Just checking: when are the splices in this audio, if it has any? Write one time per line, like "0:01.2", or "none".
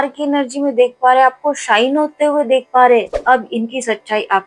0:03.1